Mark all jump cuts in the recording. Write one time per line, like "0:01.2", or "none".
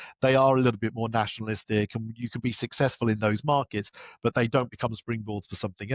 none